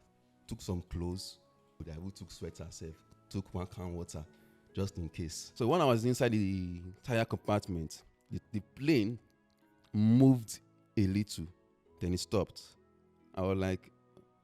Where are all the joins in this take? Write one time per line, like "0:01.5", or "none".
0:01.8
0:05.4